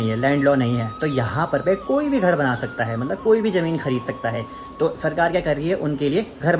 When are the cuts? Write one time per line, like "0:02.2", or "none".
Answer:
none